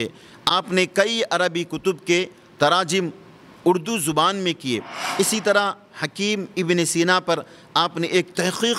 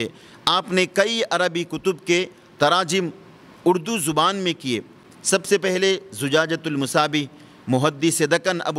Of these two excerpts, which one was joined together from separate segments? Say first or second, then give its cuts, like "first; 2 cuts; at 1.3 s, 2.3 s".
first; 1 cut; at 5.0 s